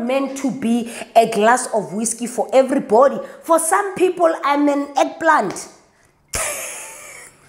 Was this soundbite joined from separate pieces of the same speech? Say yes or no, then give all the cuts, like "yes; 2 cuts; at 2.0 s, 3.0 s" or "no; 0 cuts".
no; 0 cuts